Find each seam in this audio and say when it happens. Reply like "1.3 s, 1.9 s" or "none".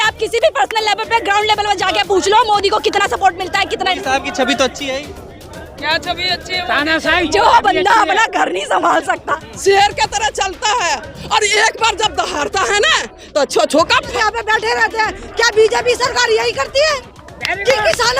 4.0 s, 9.3 s, 14.1 s